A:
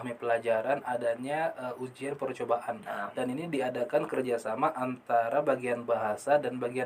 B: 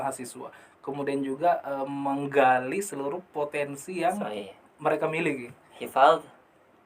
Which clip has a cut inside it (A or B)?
B